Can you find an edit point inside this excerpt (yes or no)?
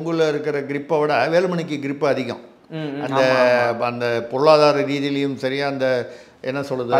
no